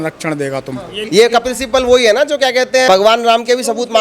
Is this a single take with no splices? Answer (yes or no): no